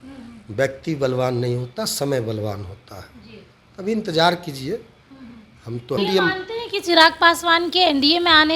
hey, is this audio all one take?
no; 1 cut; at 6.0 s

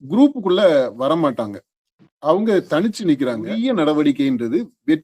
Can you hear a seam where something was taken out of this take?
yes; 1 cut; at 3.5 s

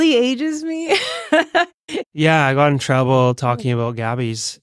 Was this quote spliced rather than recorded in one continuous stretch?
yes; 1 cut; at 2.0 s

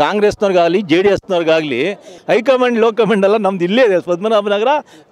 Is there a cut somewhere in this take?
yes; 1 cut; at 2.1 s

